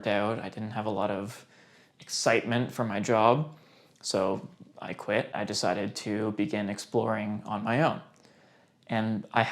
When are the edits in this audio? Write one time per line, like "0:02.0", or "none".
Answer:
0:05.3